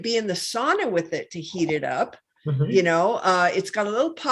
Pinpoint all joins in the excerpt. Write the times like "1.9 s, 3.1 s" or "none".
none